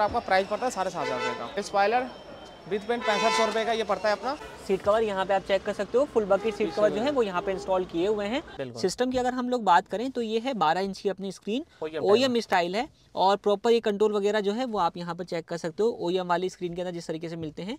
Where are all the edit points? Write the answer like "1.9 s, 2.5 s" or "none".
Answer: 1.5 s, 4.5 s, 8.6 s